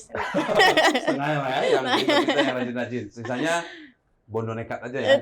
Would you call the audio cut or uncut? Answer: uncut